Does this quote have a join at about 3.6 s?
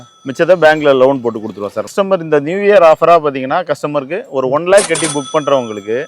no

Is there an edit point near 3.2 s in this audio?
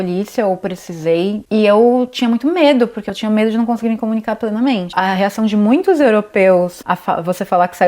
no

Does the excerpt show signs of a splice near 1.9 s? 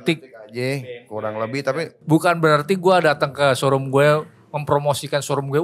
yes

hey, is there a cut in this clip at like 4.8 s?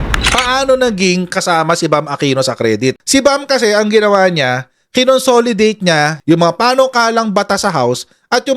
no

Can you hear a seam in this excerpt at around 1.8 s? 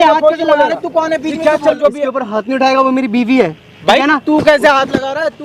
yes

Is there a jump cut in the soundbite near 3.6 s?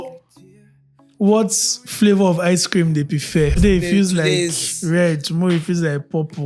yes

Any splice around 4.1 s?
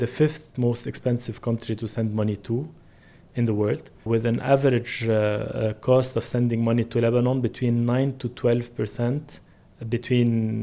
yes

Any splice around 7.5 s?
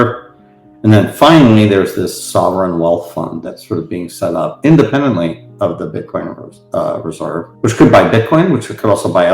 yes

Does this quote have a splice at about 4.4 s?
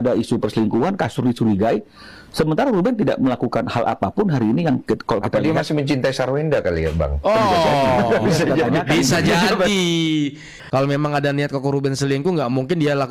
no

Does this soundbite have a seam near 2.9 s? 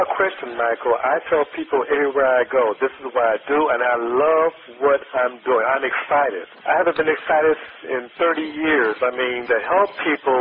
no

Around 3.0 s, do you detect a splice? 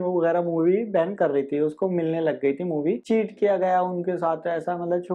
yes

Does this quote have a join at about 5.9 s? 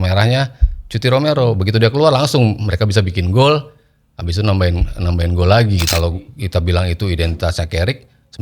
yes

